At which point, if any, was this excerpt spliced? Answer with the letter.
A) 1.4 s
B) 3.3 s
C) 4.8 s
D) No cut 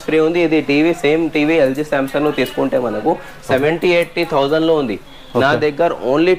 D